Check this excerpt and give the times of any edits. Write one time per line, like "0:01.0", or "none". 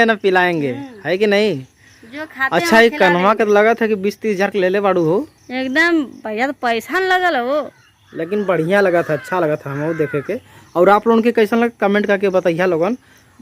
none